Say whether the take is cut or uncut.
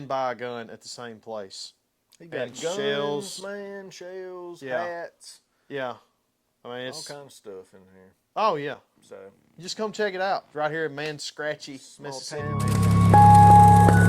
cut